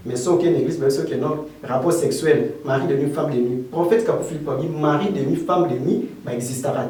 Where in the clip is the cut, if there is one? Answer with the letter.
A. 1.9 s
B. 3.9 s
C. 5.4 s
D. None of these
D